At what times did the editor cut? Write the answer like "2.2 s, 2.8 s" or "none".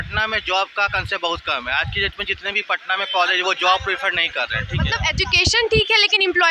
none